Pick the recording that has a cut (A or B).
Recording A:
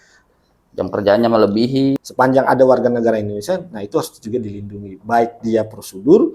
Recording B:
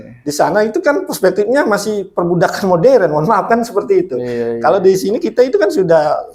A